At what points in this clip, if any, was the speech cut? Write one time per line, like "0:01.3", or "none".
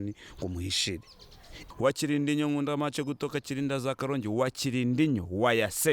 0:01.5

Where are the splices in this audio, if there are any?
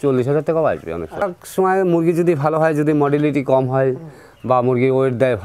0:01.2

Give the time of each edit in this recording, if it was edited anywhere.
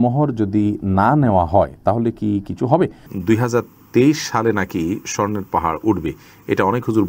0:03.0

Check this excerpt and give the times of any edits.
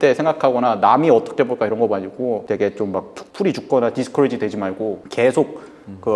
0:02.4

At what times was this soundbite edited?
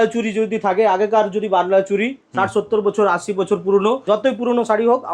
0:04.0

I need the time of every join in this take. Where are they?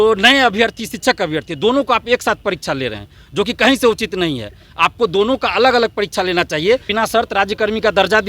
0:06.9

